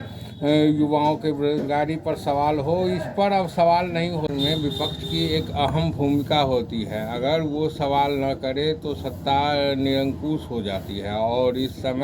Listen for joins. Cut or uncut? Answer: cut